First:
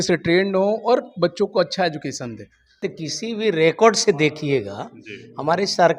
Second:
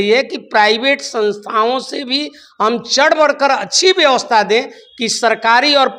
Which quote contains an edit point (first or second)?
first